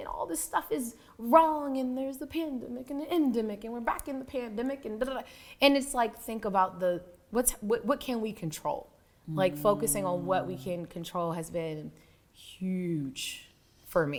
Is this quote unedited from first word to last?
yes; 0 cuts

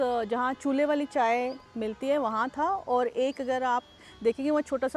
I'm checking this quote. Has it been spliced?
no; 0 cuts

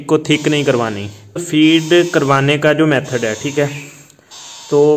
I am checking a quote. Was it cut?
yes; 1 cut; at 1.4 s

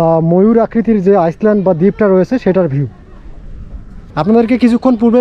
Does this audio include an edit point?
no; 0 cuts

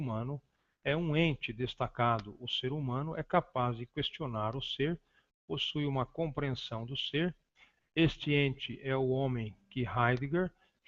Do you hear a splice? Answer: no; 0 cuts

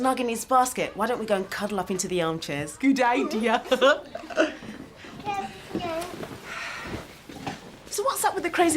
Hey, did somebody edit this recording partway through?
yes; 1 cut; at 1.5 s

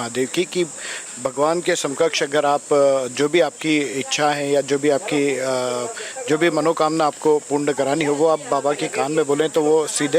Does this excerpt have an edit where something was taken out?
no; 0 cuts

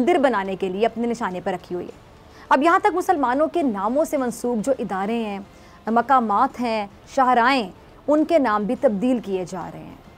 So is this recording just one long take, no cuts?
yes; 0 cuts

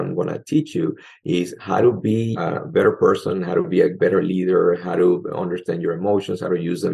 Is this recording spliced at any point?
yes; 3 cuts; at 2.4 s, 3.9 s, 5.2 s

